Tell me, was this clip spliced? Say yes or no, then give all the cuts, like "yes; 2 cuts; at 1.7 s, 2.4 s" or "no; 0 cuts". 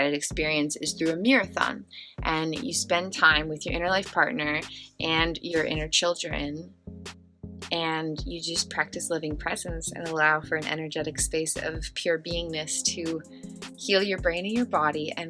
no; 0 cuts